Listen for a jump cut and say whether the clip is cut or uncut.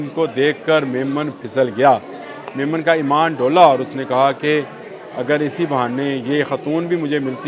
uncut